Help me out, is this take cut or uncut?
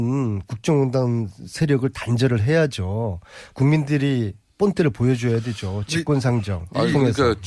uncut